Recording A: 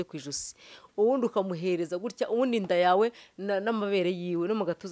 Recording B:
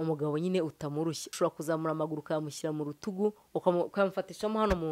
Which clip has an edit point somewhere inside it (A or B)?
B